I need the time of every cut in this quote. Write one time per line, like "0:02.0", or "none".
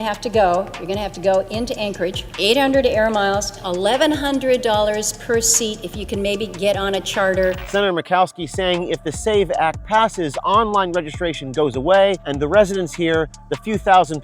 none